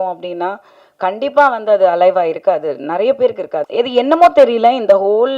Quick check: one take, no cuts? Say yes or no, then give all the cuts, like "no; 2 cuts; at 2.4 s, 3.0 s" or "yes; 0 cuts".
no; 1 cut; at 3.7 s